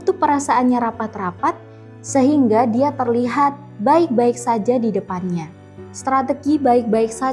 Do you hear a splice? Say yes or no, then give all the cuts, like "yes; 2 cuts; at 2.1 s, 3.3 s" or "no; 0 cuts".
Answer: yes; 1 cut; at 5.7 s